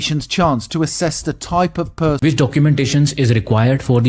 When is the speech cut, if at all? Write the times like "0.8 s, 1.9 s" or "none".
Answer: 2.2 s